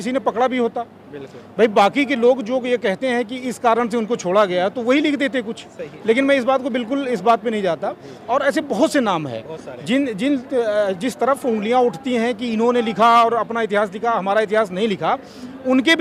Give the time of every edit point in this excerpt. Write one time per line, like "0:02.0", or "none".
none